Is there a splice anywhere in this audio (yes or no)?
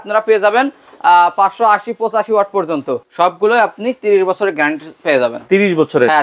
yes